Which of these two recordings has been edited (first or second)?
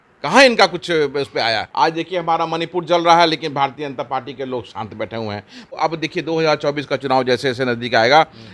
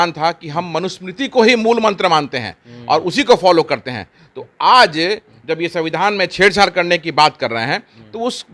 first